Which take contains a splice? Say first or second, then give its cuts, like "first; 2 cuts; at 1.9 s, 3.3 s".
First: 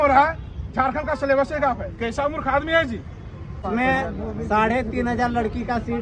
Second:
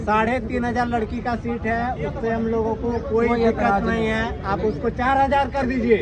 first; 1 cut; at 3.5 s